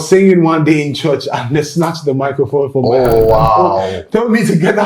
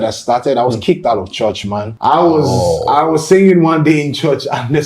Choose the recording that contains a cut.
second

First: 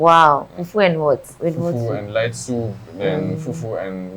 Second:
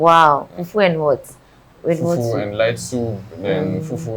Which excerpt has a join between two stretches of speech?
first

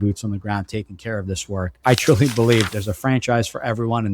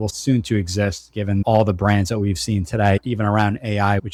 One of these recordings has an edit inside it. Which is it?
first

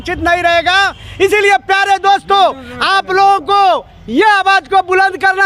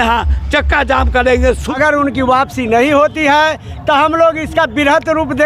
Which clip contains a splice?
second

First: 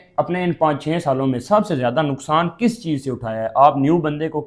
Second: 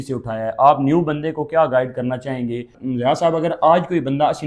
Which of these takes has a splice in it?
second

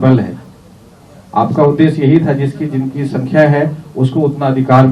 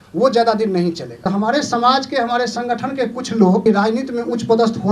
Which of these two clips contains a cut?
second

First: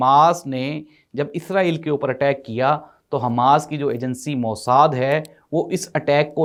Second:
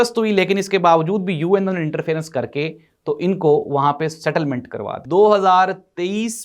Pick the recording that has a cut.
second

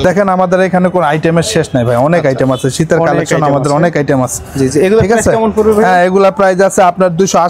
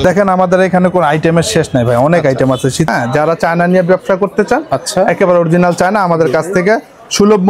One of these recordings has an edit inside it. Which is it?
second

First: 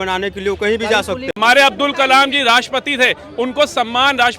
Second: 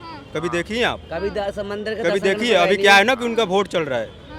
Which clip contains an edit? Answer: first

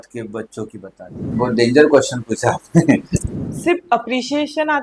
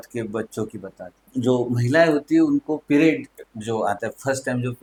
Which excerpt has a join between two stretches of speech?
first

